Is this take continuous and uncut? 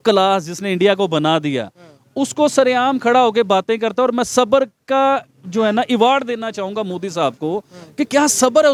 yes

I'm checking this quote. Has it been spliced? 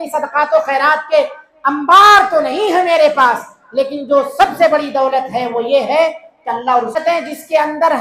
yes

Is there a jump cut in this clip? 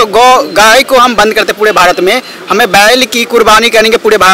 no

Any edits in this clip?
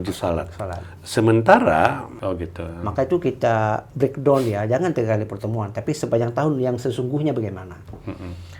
yes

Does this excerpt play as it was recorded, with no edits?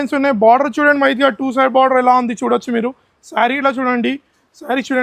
yes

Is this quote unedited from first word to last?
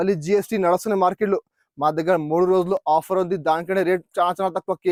yes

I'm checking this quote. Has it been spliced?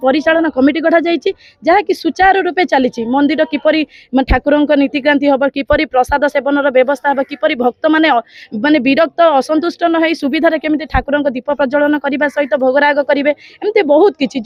no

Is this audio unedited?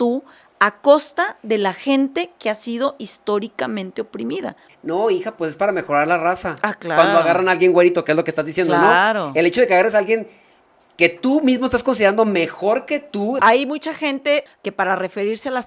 no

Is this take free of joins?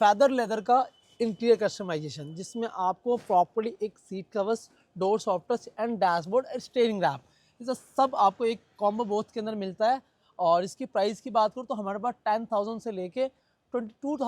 yes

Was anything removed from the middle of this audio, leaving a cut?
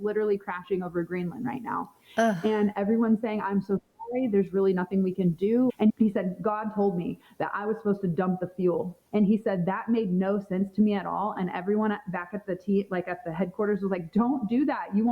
yes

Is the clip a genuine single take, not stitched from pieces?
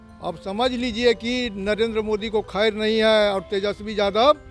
yes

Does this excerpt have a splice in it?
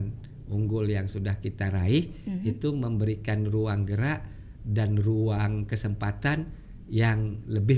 no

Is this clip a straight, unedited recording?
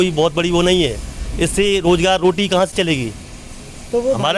yes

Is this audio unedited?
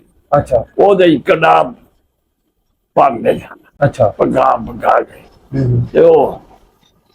yes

